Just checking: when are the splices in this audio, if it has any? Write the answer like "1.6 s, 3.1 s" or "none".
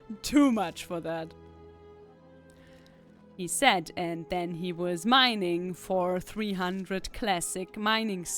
none

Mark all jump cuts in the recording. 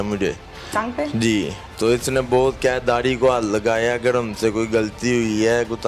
1.6 s

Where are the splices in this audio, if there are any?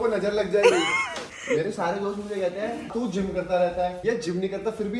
1.3 s, 2.9 s, 4.0 s

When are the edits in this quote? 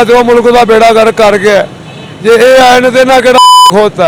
none

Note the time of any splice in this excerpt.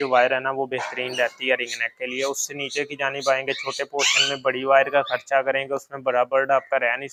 none

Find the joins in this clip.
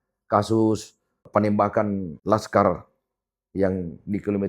1.2 s, 2.1 s

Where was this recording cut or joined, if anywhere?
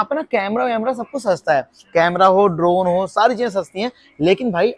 none

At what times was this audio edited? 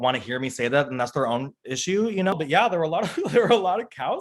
2.3 s

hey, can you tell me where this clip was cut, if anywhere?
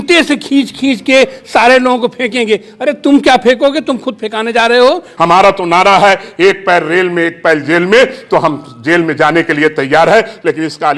5.1 s

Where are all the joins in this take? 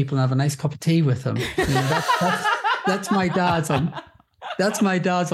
none

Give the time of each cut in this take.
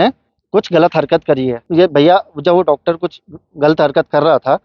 1.6 s

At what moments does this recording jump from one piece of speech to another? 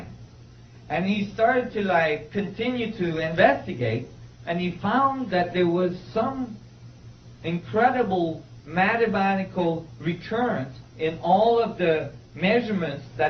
4.0 s

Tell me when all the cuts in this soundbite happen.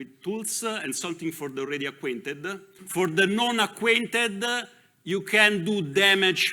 2.7 s

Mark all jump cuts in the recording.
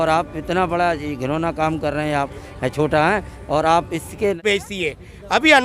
4.4 s

